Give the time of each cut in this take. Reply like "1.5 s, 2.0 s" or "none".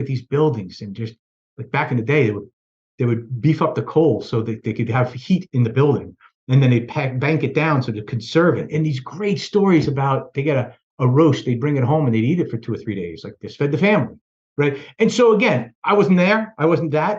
8.7 s